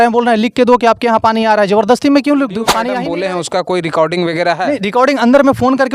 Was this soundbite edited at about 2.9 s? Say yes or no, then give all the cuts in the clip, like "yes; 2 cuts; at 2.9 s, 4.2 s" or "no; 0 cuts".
yes; 1 cut; at 2.9 s